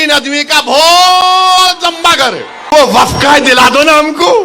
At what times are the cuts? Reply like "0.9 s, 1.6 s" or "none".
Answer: 2.7 s